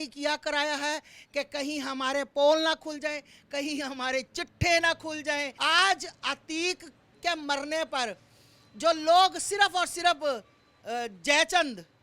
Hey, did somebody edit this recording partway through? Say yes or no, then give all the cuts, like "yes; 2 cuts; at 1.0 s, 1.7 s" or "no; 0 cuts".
yes; 1 cut; at 5.5 s